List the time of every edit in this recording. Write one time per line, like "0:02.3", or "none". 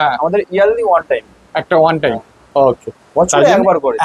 none